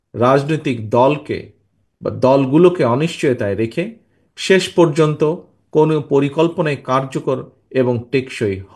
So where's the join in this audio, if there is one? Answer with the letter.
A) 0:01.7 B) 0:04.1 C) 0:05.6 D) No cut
D